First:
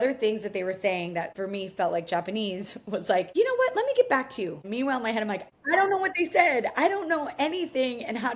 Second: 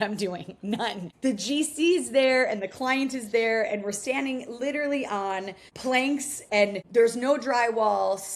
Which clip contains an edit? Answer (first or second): first